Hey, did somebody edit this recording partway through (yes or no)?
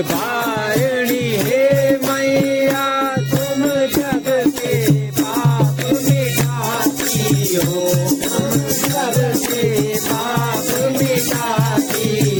no